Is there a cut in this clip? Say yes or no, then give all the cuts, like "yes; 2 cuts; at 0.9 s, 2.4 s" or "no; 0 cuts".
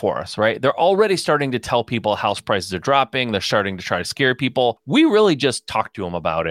yes; 1 cut; at 4.8 s